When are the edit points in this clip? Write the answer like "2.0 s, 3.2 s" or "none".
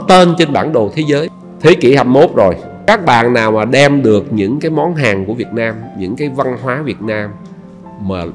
1.4 s, 2.7 s